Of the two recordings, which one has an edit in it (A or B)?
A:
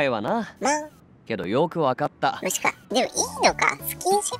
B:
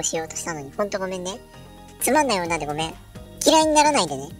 A